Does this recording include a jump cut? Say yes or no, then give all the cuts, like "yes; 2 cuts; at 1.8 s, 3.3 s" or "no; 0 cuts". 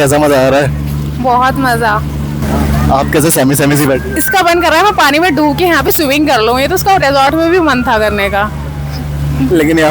no; 0 cuts